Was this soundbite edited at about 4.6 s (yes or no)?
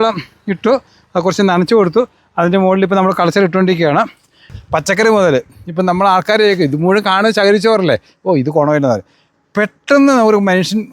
yes